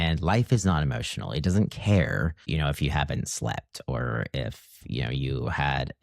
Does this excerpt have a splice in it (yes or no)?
yes